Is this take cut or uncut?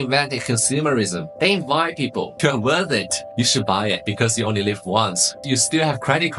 cut